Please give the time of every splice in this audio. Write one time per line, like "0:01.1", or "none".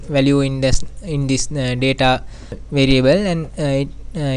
0:02.6